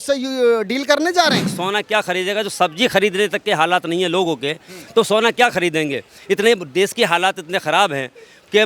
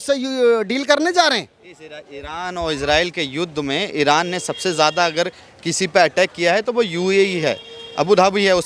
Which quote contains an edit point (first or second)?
first